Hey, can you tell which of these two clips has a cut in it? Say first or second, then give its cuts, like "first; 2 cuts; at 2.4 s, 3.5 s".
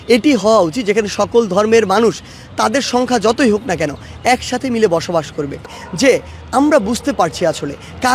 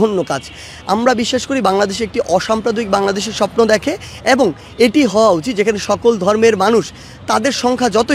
first; 1 cut; at 5.6 s